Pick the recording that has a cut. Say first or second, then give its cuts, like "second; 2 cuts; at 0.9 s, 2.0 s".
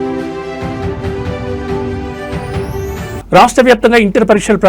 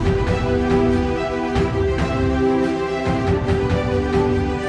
first; 1 cut; at 3.2 s